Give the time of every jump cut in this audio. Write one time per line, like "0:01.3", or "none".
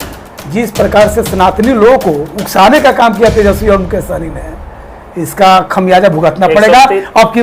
none